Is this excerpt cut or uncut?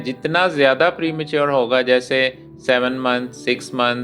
uncut